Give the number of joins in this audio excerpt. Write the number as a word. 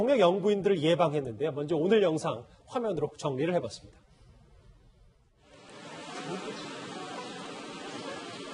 zero